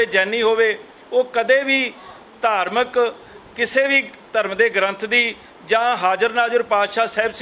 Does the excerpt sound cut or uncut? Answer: uncut